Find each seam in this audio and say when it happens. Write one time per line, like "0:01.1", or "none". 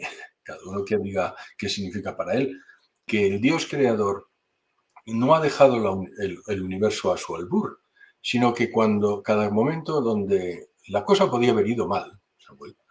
0:03.1